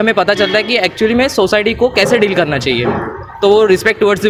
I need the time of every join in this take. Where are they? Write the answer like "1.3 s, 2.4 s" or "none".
none